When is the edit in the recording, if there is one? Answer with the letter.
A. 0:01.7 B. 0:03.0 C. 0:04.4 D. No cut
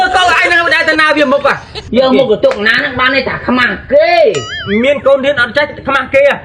A